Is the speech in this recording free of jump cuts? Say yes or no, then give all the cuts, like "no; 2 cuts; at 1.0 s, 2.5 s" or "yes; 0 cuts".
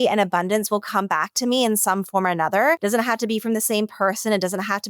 no; 1 cut; at 2.8 s